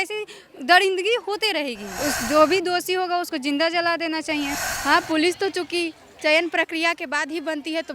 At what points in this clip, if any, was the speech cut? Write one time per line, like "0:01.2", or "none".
0:01.9
0:04.6